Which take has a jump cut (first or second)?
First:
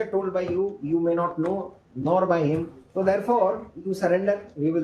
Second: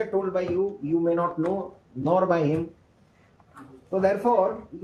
first